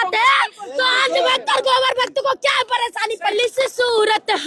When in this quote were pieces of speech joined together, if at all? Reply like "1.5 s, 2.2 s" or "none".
3.3 s